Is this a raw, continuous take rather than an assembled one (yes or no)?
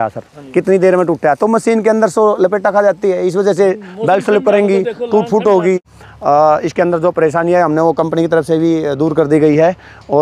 no